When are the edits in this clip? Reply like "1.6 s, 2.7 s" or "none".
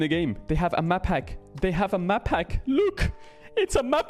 none